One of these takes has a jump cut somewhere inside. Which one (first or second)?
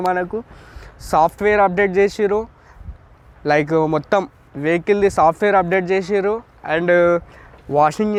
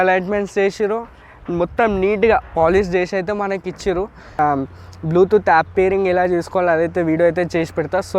second